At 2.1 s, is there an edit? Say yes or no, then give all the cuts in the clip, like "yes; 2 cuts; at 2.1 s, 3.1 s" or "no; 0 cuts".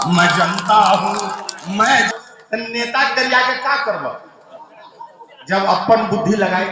yes; 1 cut; at 2.1 s